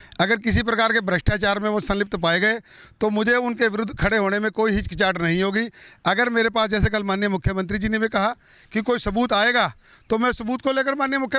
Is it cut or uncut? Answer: uncut